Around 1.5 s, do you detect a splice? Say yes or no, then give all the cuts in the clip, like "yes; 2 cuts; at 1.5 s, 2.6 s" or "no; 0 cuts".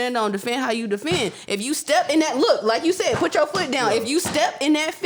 no; 0 cuts